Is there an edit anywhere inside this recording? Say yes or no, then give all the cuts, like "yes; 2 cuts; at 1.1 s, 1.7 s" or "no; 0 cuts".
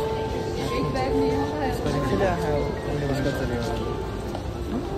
no; 0 cuts